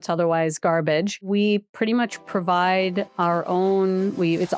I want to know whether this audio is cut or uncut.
cut